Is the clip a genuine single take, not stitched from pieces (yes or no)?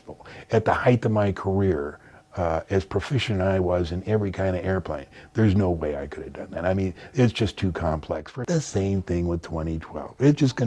no